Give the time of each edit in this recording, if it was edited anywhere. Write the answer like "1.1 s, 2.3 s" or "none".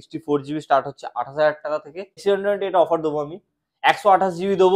2.1 s